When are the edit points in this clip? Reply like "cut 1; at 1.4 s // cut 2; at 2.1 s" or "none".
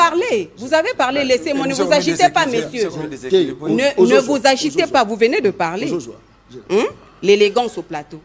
none